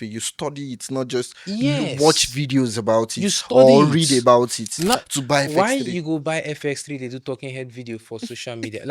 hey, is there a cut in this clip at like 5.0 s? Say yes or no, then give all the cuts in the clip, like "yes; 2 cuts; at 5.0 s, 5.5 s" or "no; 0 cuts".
yes; 1 cut; at 5.0 s